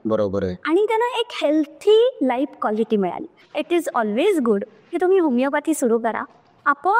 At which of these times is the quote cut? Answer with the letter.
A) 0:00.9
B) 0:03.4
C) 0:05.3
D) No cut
B